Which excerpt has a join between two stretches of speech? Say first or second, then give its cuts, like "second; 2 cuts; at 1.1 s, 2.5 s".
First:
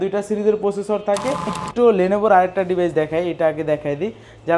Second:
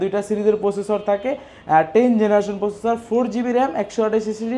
first; 1 cut; at 1.5 s